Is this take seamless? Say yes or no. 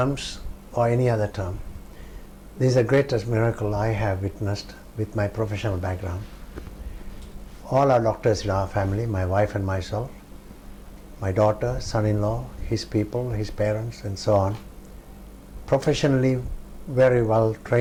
yes